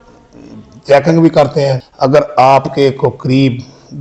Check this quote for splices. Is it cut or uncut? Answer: cut